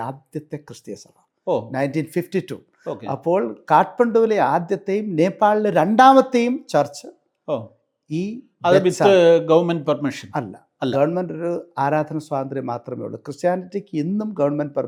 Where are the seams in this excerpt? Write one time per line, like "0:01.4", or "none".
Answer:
none

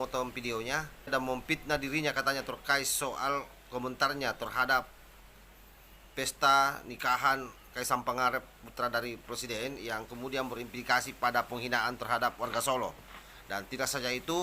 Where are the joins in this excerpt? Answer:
0:01.1

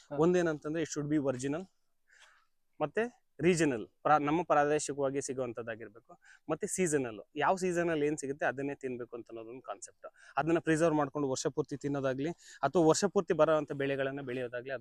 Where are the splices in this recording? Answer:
none

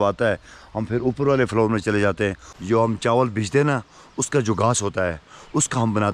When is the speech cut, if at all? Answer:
0:02.5

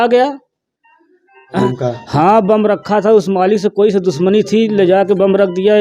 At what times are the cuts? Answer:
0:01.6

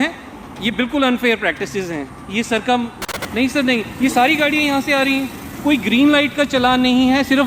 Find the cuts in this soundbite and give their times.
0:03.0

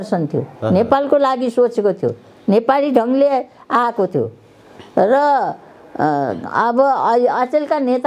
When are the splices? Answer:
none

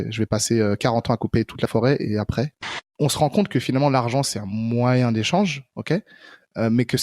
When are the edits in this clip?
0:02.8

